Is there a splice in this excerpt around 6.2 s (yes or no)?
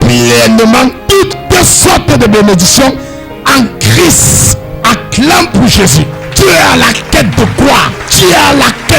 yes